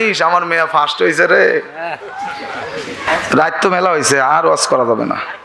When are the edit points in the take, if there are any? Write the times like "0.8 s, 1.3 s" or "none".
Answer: 3.0 s